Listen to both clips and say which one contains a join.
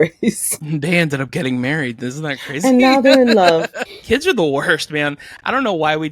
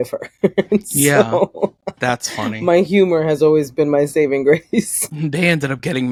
first; 1 cut; at 3.9 s

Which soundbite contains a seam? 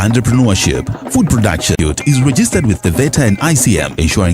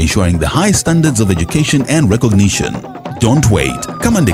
first; 1 cut; at 1.8 s

